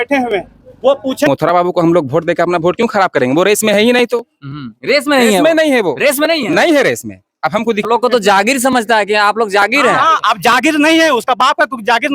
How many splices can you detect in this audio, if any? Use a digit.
2